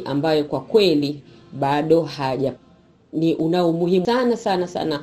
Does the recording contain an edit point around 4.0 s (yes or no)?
yes